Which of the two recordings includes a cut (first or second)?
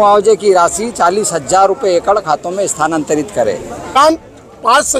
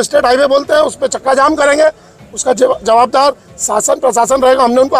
first